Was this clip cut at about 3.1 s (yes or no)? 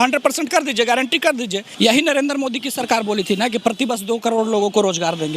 no